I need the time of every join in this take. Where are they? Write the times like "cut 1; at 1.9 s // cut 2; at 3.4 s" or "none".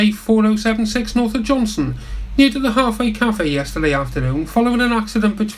none